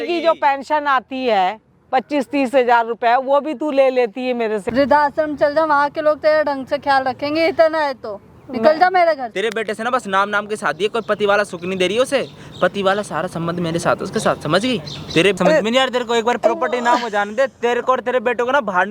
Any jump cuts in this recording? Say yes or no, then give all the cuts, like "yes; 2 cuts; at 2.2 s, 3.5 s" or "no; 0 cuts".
yes; 3 cuts; at 4.6 s, 9.3 s, 15.4 s